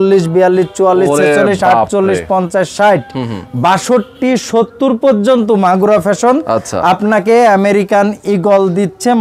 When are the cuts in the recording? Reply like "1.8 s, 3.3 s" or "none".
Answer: none